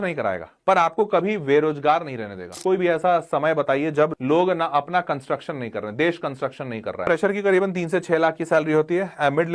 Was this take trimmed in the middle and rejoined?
yes; 3 cuts; at 2.6 s, 4.2 s, 7.1 s

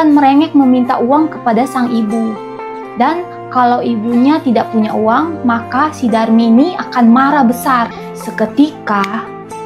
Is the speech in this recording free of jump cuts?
no; 1 cut; at 8.0 s

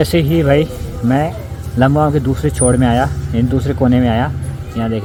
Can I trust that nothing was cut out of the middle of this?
yes; 0 cuts

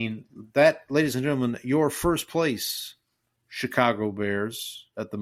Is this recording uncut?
yes; 0 cuts

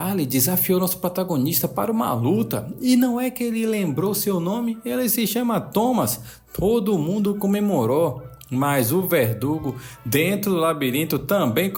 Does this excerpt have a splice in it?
no; 0 cuts

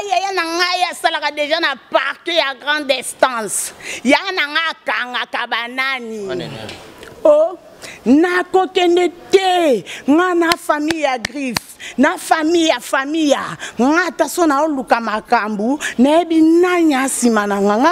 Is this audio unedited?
yes; 0 cuts

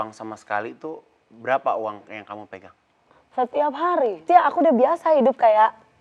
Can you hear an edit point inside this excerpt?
yes; 1 cut; at 4.2 s

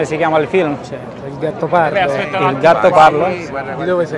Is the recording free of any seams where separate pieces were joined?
yes; 0 cuts

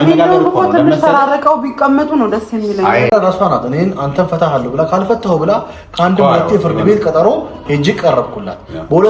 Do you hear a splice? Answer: yes; 1 cut; at 3.1 s

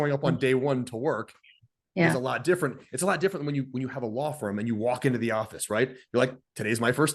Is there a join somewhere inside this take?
no; 0 cuts

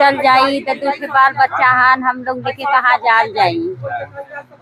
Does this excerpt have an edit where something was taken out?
no; 0 cuts

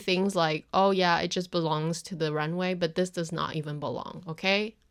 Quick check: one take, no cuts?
yes; 0 cuts

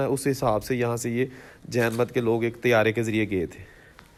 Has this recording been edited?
no; 0 cuts

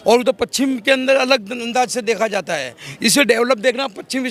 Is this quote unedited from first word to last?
yes; 0 cuts

